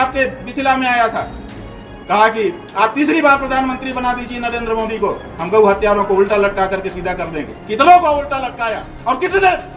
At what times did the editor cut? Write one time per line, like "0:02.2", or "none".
none